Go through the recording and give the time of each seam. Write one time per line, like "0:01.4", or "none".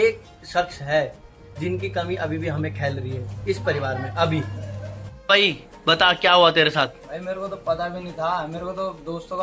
0:05.1